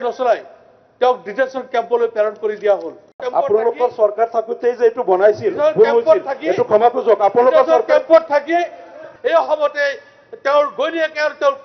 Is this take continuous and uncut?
no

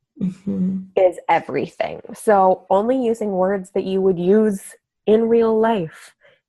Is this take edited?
no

